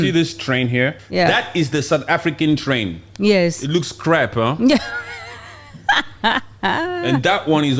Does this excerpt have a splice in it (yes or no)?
yes